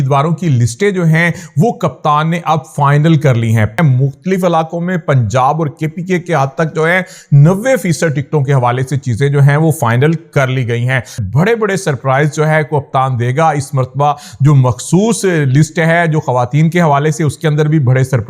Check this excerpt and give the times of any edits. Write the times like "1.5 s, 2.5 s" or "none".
3.8 s, 11.2 s